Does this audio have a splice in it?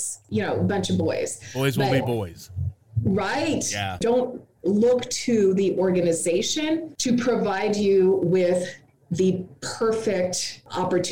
yes; 1 cut; at 4.0 s

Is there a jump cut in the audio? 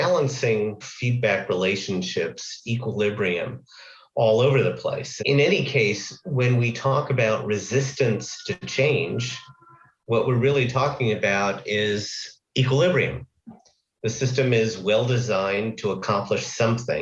yes; 2 cuts; at 5.1 s, 8.6 s

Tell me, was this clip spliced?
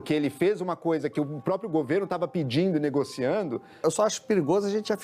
yes; 1 cut; at 3.7 s

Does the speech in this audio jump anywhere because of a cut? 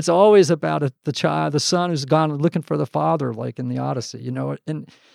no; 0 cuts

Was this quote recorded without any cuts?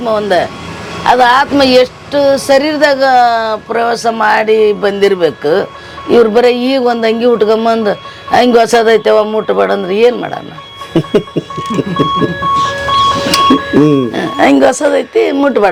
yes; 0 cuts

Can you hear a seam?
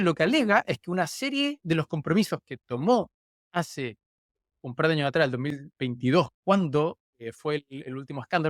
no; 0 cuts

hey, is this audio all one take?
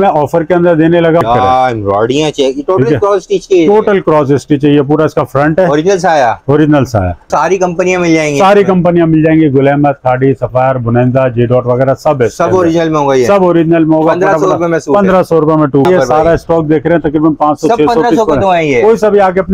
no; 3 cuts; at 1.2 s, 7.2 s, 15.9 s

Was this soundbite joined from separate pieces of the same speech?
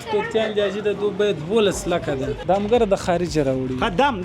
yes; 1 cut; at 2.4 s

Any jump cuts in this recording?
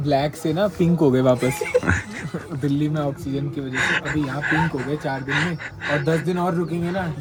no; 0 cuts

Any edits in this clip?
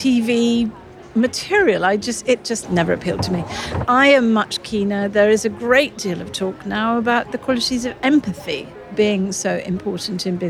yes; 2 cuts; at 2.6 s, 3.8 s

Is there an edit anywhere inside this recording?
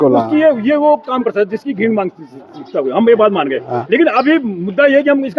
no; 0 cuts

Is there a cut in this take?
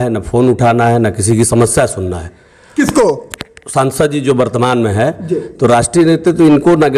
no; 0 cuts

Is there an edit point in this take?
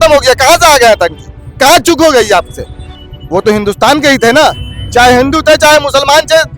yes; 1 cut; at 2.8 s

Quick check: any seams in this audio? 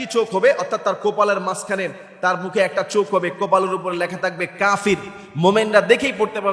no; 0 cuts

